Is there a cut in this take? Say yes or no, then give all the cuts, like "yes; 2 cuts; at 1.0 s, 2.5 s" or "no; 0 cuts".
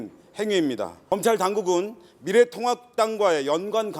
yes; 1 cut; at 0.9 s